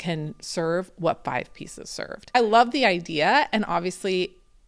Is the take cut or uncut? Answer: cut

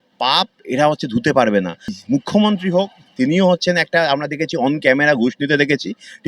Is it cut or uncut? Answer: cut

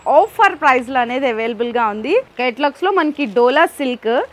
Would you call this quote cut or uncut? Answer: cut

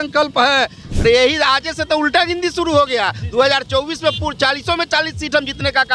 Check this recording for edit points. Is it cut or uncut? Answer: cut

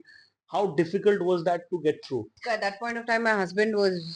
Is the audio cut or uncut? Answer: cut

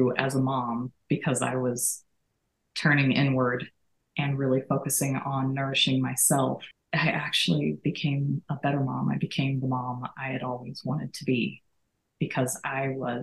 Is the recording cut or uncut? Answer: cut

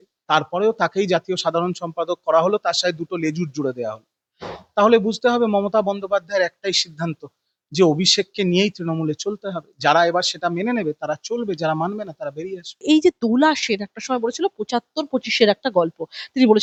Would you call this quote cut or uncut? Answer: uncut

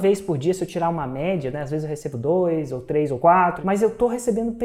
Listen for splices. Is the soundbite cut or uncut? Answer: cut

